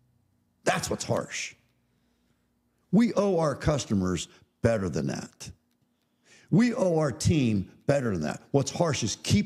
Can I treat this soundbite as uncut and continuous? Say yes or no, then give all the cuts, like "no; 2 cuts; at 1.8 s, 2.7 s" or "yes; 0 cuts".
yes; 0 cuts